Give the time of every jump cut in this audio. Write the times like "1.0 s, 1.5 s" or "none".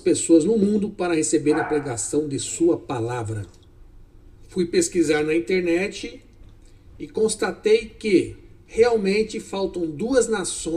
none